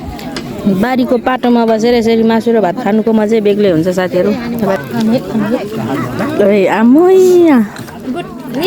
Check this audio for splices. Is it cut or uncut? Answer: cut